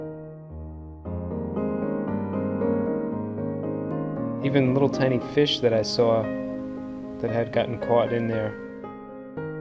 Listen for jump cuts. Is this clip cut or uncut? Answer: uncut